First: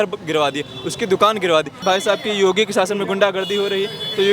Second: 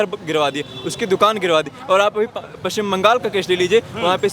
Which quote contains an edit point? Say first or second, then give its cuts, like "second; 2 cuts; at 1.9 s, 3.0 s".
first; 1 cut; at 1.8 s